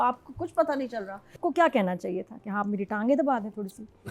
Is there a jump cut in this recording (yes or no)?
yes